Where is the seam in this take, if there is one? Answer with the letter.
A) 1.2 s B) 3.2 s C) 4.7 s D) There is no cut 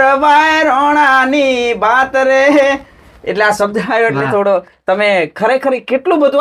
D